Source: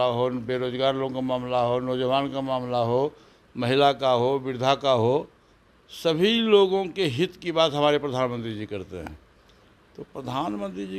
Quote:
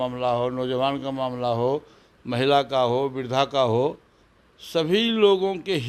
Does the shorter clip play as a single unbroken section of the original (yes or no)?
yes